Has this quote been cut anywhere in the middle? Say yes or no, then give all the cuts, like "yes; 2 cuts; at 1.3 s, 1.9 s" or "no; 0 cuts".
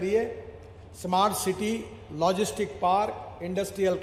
no; 0 cuts